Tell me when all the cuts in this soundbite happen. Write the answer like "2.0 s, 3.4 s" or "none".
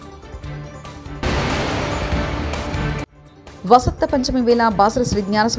1.0 s, 3.0 s